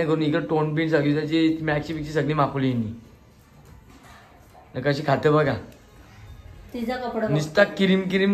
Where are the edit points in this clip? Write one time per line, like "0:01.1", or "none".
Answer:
none